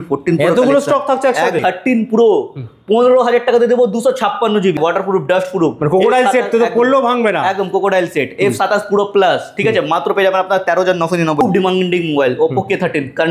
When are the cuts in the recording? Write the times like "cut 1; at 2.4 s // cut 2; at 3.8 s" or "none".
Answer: cut 1; at 1.6 s // cut 2; at 4.8 s // cut 3; at 11.4 s